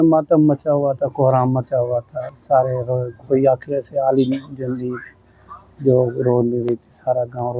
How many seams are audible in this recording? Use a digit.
0